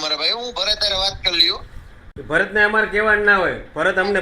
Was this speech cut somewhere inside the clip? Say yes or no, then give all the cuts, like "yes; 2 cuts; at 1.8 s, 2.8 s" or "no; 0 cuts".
yes; 1 cut; at 2.1 s